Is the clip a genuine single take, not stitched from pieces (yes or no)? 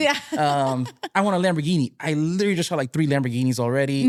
yes